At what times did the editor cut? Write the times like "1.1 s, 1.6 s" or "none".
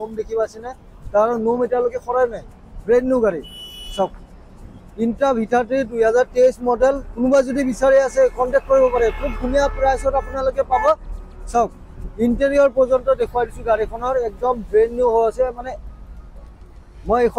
none